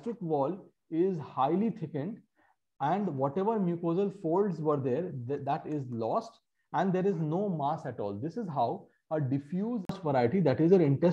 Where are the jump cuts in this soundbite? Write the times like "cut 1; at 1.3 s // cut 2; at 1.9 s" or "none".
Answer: cut 1; at 10.0 s